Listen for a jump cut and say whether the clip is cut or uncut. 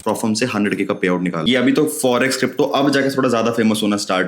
cut